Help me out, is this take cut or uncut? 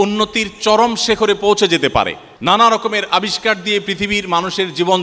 cut